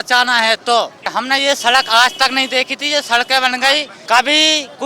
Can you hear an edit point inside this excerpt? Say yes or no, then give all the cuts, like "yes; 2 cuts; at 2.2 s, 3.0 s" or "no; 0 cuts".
yes; 2 cuts; at 1.0 s, 3.9 s